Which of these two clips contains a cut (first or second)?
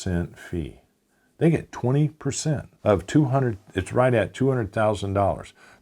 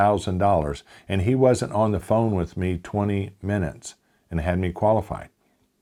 first